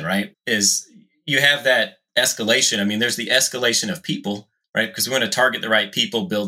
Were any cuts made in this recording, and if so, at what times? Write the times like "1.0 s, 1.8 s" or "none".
4.5 s